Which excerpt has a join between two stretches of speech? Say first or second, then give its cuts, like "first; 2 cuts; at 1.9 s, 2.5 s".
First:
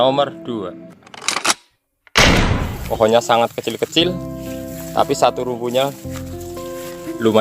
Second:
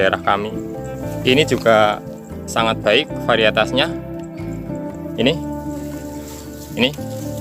first; 1 cut; at 2.8 s